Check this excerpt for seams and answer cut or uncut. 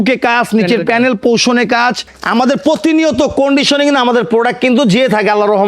cut